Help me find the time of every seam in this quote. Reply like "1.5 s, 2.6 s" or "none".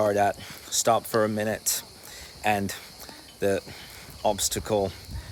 none